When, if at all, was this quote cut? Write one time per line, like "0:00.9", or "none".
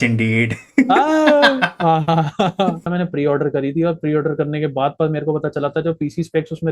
0:02.9